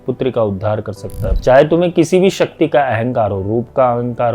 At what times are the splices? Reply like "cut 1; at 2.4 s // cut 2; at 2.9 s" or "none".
cut 1; at 1.4 s